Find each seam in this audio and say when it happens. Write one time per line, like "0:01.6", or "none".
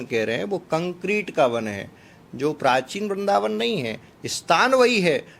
none